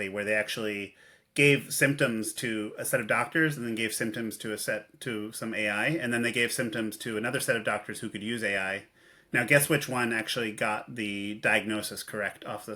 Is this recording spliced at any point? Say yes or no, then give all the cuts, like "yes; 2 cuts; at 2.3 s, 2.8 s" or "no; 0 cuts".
no; 0 cuts